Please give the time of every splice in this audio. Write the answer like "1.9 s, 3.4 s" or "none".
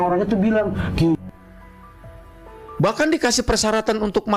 none